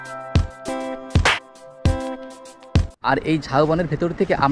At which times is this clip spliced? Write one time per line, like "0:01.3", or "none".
0:02.9